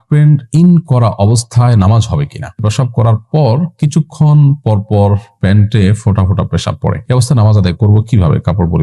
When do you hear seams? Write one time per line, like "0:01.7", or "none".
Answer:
0:02.7
0:07.0

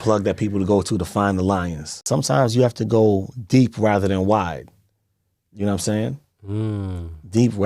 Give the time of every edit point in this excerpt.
0:02.1

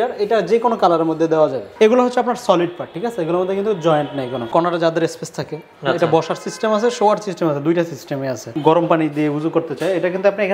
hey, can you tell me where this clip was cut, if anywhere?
0:01.6
0:04.5
0:08.5

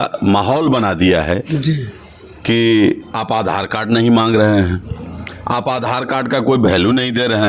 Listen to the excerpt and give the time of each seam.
none

